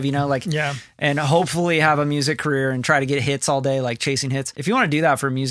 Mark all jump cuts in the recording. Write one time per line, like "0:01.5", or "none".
0:04.5